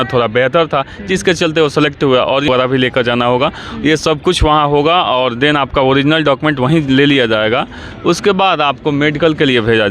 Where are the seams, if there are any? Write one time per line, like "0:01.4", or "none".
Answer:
0:02.5